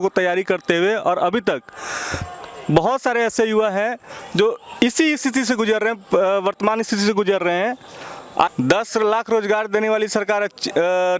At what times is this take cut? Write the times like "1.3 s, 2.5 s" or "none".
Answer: 8.5 s